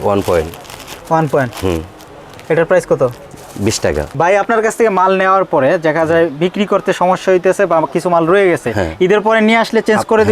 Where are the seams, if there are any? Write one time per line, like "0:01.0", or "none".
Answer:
0:04.1